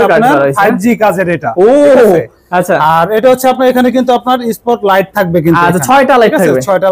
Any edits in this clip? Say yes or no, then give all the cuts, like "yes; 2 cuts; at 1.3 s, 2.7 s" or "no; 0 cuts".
no; 0 cuts